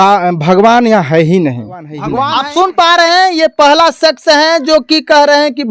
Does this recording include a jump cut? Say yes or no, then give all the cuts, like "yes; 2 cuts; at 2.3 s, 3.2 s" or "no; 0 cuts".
yes; 1 cut; at 2.1 s